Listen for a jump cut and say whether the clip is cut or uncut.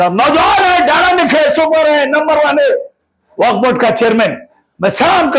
uncut